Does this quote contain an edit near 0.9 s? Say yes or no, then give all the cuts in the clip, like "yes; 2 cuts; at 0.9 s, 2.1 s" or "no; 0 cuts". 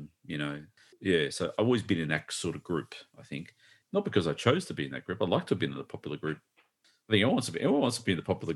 yes; 1 cut; at 0.9 s